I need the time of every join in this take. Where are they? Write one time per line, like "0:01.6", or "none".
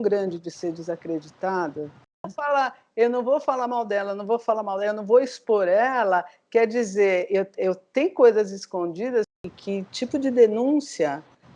0:02.3
0:09.4